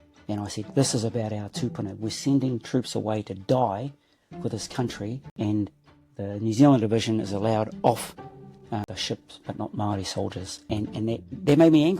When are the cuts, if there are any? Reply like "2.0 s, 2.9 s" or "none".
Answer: 5.3 s, 8.9 s, 10.6 s

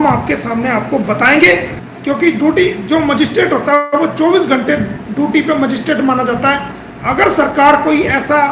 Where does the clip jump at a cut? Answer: 1.8 s

